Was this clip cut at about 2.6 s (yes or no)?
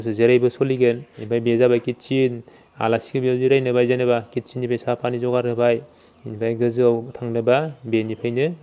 no